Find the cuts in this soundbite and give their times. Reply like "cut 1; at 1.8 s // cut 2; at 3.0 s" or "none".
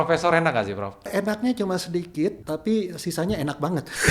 cut 1; at 1.1 s // cut 2; at 2.4 s